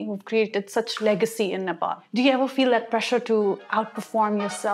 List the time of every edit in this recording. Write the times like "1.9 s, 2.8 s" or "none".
2.0 s